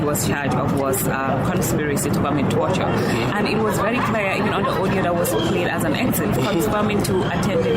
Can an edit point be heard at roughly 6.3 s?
yes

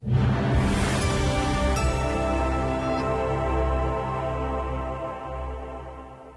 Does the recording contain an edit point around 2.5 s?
no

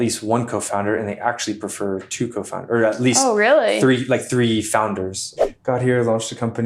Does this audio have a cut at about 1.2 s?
no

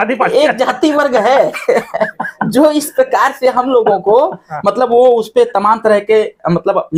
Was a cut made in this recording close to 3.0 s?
no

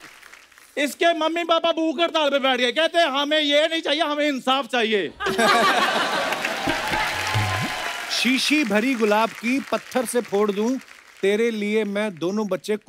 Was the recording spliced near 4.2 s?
no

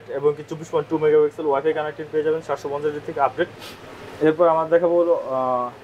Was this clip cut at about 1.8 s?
no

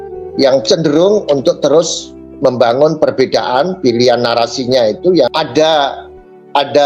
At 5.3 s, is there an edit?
yes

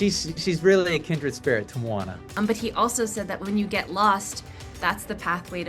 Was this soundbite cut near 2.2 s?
yes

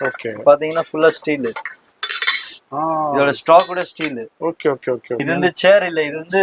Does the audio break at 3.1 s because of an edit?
no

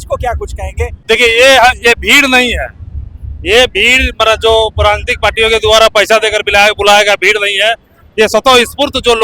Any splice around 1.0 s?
yes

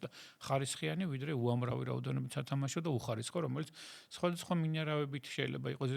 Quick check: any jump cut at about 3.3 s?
no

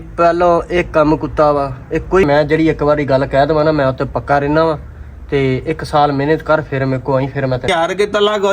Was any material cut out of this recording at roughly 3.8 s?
no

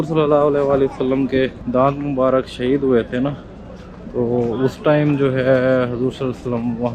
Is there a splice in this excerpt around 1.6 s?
yes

